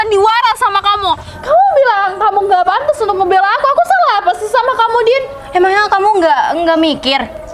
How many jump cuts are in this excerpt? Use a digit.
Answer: 1